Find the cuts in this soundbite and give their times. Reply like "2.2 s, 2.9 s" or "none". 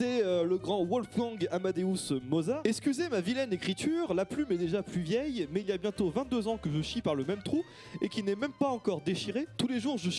2.6 s